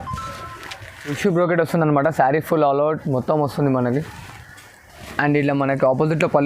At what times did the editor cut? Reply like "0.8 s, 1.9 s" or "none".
1.2 s